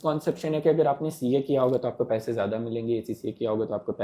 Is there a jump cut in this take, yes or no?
no